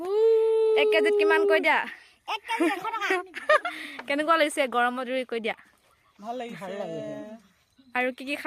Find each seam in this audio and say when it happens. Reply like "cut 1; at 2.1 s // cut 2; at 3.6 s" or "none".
cut 1; at 3.6 s